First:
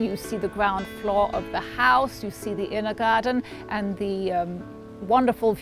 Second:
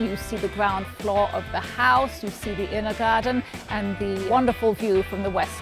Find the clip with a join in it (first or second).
second